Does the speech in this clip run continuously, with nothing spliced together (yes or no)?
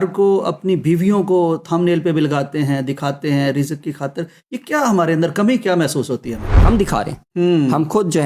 no